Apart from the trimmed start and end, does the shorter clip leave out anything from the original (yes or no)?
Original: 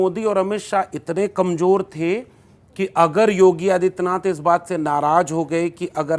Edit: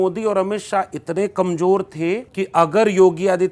yes